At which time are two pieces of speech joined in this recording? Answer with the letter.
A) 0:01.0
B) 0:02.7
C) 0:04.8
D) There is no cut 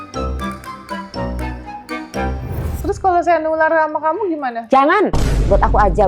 B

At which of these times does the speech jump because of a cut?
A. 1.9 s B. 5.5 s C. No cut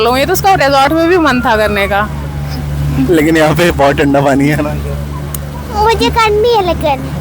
C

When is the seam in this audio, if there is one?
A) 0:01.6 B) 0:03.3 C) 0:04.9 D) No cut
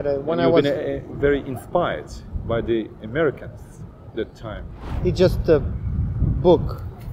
C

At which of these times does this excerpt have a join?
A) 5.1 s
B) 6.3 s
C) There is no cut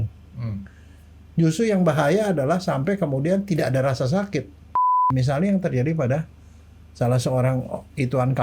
A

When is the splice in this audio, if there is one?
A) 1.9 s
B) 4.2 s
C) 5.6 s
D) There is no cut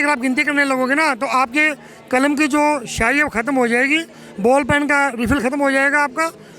D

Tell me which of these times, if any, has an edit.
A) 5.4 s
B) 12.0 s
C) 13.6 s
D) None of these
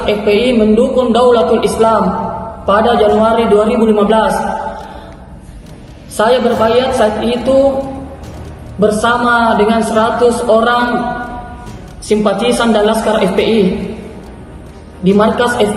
D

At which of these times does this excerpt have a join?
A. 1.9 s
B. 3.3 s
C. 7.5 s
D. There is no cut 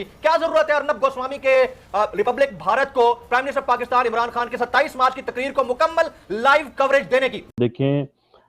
C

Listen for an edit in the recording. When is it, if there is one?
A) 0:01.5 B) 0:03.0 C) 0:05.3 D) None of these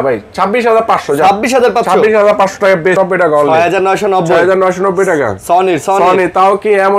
B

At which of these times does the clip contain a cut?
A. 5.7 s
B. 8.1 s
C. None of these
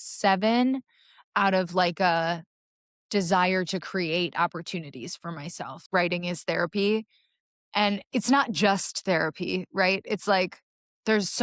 A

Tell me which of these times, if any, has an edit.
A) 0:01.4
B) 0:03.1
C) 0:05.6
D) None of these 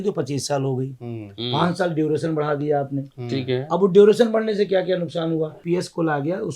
C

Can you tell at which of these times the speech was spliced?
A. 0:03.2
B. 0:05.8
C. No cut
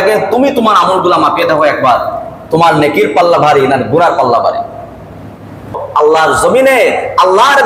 B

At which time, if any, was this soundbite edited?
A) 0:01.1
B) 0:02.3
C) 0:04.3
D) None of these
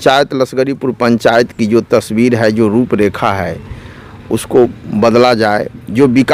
D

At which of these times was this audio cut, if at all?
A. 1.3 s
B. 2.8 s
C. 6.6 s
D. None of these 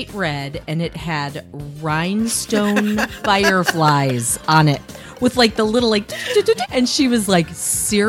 C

